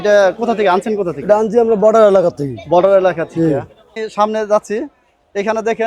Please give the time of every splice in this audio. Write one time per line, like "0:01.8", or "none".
0:03.9